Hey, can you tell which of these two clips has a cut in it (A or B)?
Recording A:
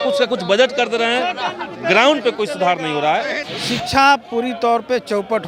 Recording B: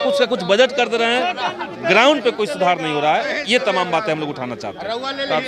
A